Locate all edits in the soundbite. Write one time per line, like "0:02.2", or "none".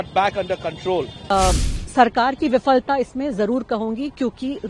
0:01.3

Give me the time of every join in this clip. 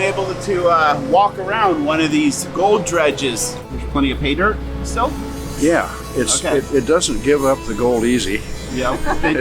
0:03.7

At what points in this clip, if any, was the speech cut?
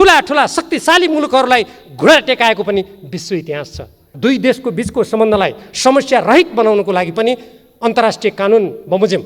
0:04.0

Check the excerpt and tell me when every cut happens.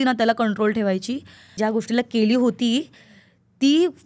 0:01.5

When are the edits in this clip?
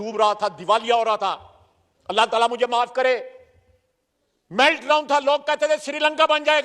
none

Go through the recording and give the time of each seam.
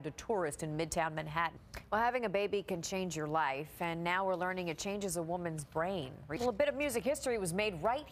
0:06.1

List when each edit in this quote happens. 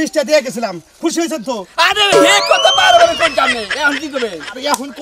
none

